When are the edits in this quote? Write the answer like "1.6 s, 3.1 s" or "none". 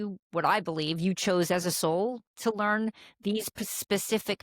none